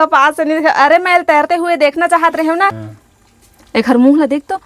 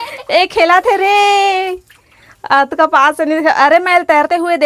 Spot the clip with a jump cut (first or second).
first